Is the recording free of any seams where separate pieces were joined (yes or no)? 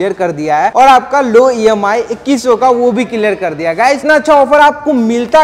no